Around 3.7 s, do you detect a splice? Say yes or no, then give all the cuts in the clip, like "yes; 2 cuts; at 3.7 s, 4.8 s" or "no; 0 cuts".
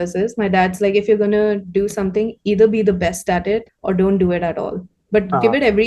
yes; 1 cut; at 3.7 s